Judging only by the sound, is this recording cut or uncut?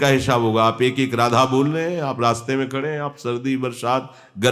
uncut